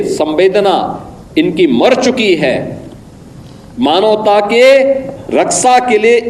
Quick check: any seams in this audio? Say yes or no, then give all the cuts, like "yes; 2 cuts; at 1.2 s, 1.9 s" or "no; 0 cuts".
no; 0 cuts